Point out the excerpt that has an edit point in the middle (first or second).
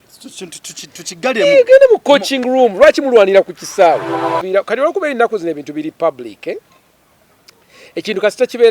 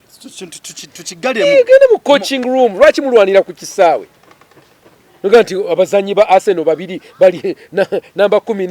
first